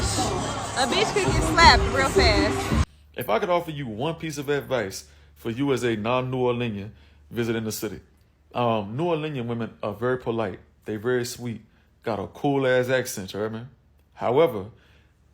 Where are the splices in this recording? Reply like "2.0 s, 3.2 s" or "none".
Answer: 2.8 s